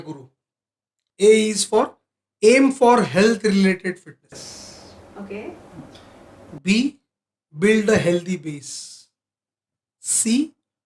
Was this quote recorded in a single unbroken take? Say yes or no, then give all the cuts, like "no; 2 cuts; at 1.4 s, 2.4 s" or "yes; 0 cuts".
no; 1 cut; at 1.0 s